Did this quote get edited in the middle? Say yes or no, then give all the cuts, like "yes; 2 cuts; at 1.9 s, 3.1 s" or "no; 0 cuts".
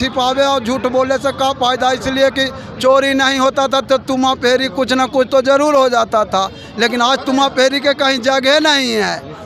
no; 0 cuts